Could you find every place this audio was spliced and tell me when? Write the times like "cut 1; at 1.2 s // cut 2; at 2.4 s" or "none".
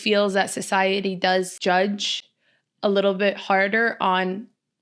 cut 1; at 1.5 s